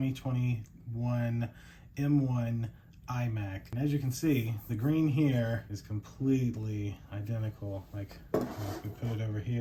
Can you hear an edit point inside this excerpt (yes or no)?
no